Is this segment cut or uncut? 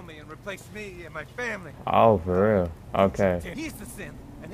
cut